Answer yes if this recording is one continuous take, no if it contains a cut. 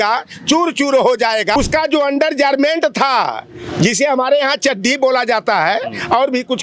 no